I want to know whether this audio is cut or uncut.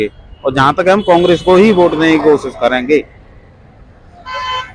uncut